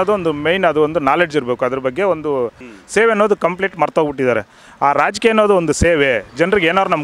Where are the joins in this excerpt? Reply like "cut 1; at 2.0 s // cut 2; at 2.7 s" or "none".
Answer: cut 1; at 2.7 s